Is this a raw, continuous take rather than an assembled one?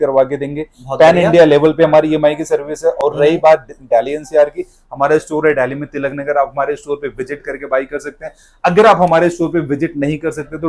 yes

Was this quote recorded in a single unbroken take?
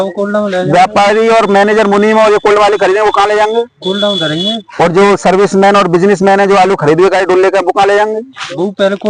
yes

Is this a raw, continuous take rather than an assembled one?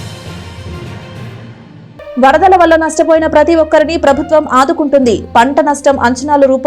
yes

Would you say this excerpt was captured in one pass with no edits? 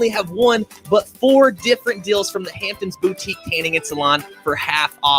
yes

